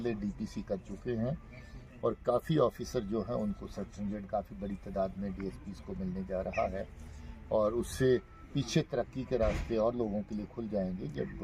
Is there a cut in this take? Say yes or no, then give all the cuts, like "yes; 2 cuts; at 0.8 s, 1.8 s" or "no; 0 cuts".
no; 0 cuts